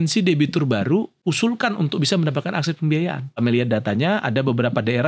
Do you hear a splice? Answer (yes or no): yes